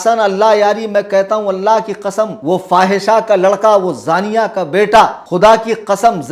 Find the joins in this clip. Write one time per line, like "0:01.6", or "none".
0:02.4
0:05.2